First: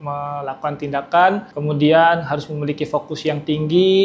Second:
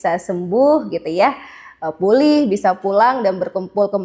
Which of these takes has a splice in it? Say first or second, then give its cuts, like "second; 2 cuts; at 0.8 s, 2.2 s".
first; 1 cut; at 1.5 s